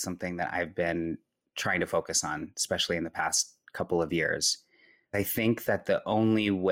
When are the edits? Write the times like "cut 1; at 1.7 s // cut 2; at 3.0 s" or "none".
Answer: cut 1; at 5.1 s